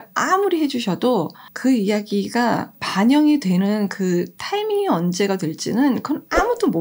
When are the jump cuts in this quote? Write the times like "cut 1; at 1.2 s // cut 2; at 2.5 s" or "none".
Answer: cut 1; at 1.4 s // cut 2; at 2.8 s